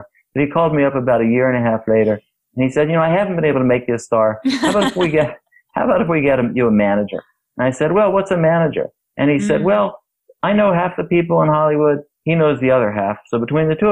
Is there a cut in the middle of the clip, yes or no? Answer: no